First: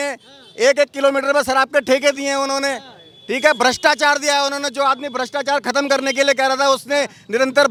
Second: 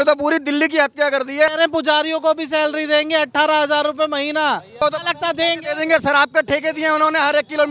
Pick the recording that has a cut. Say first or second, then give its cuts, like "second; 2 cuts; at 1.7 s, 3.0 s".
second; 2 cuts; at 1.5 s, 4.8 s